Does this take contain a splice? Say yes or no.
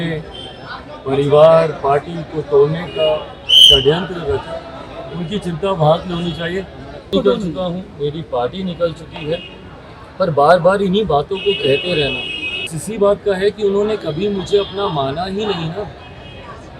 yes